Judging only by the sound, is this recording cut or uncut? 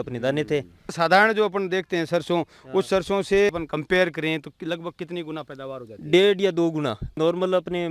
cut